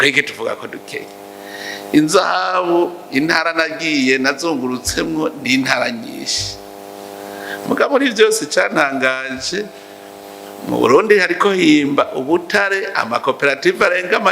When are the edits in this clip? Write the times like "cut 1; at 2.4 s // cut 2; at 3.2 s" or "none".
none